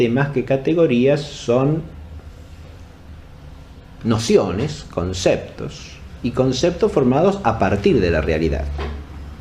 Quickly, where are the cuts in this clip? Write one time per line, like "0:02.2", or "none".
0:02.6

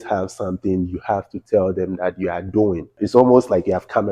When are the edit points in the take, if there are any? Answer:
0:02.9

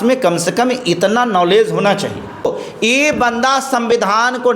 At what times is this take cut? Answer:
0:02.5

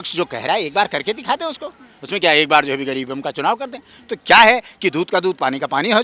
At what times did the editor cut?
none

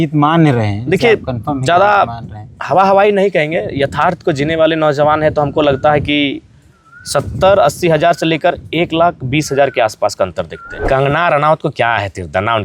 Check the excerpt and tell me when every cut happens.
0:10.9

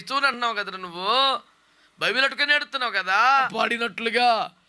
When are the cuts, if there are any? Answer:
0:03.5

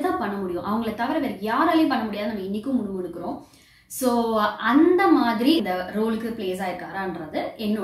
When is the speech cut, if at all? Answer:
0:05.6

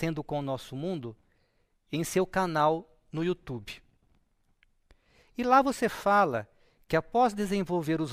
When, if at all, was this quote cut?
none

